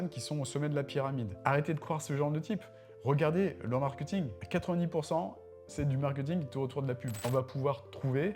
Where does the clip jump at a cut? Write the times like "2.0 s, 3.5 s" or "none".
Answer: 1.3 s, 4.4 s, 7.3 s

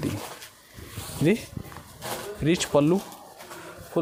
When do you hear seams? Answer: none

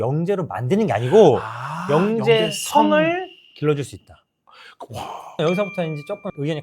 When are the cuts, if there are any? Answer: 5.2 s

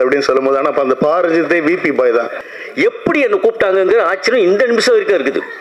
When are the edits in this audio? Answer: 2.4 s

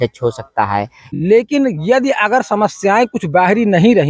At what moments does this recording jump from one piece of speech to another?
1.0 s

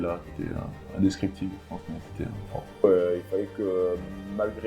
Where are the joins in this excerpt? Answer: 2.8 s

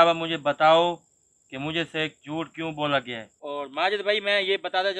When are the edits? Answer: 3.3 s

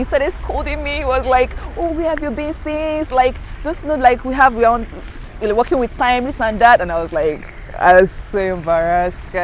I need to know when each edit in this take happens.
none

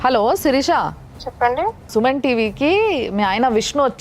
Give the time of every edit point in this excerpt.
none

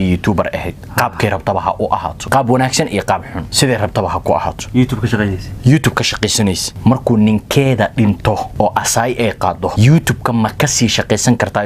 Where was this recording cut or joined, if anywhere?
2.2 s, 3.4 s, 6.7 s, 8.5 s, 9.7 s

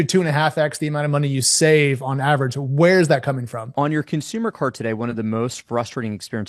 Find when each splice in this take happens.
3.7 s

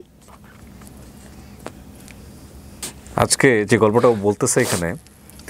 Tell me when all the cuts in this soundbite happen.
2.8 s

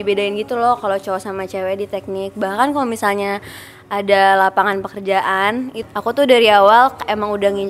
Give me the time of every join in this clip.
5.8 s

